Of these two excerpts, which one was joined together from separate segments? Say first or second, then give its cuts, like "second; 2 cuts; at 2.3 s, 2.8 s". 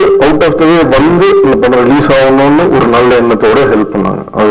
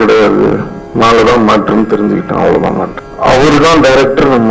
second; 1 cut; at 2.9 s